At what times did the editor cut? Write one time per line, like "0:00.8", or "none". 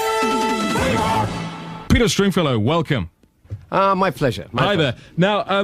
none